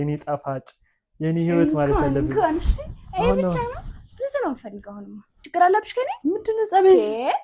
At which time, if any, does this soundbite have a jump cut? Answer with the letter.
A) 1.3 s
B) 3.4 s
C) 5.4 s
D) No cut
C